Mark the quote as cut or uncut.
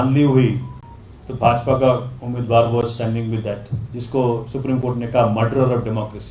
uncut